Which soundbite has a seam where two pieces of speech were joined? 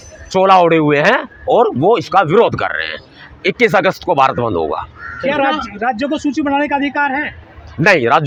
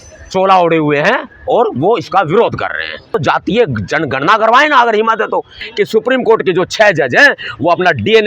second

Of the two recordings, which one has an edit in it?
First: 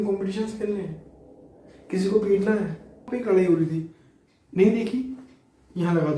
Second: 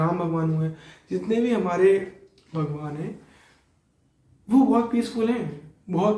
first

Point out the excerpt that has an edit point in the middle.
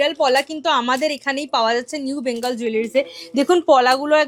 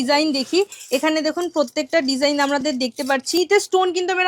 second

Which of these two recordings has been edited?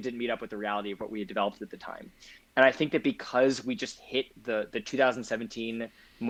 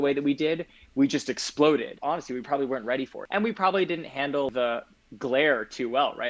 second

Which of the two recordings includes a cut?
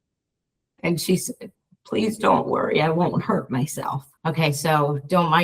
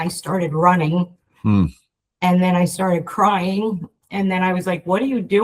first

